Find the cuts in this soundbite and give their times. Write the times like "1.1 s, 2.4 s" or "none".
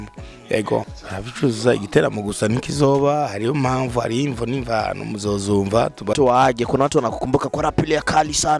1.0 s, 6.1 s